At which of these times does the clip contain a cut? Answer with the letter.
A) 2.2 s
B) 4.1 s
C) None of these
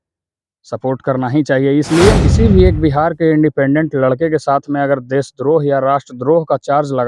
A